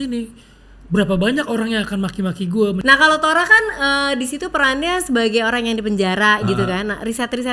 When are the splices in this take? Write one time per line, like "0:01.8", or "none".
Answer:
0:02.8